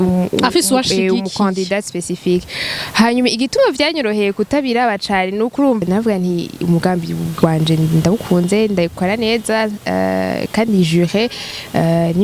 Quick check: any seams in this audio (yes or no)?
yes